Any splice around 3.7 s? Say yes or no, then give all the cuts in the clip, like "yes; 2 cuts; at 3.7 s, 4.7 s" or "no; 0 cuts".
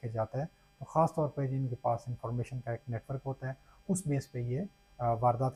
no; 0 cuts